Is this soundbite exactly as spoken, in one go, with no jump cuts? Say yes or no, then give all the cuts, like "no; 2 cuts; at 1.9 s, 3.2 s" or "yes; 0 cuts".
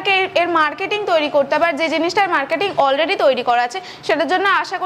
yes; 0 cuts